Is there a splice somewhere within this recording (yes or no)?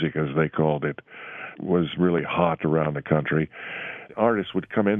yes